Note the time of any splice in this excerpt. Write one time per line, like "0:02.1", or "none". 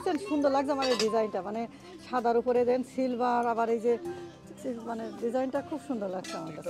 none